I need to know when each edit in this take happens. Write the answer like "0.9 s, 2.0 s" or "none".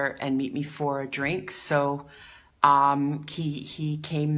none